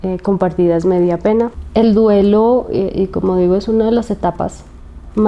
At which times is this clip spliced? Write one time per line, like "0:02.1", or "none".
0:01.6